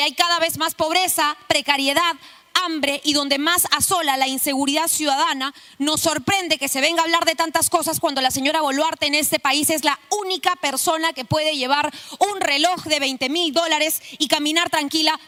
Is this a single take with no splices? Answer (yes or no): yes